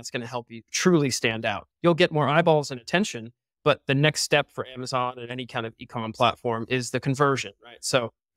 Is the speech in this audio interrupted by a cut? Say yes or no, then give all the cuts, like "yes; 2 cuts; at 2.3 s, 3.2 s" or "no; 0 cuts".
no; 0 cuts